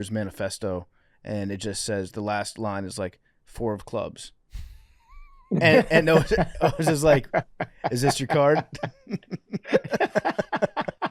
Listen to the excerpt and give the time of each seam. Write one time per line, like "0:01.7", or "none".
none